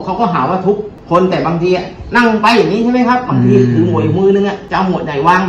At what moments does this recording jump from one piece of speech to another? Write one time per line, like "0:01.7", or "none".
0:00.9
0:04.6

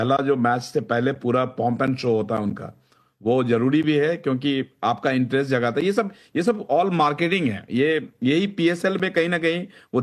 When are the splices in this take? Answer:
none

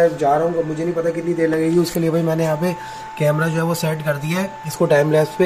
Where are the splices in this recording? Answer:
none

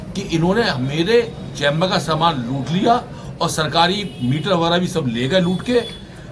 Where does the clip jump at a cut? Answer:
none

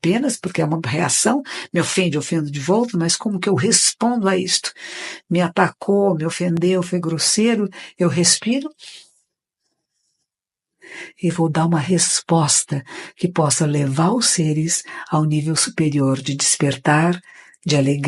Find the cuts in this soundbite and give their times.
none

